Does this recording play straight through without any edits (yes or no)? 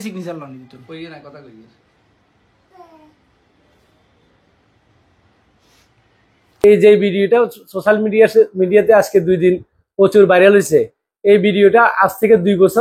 no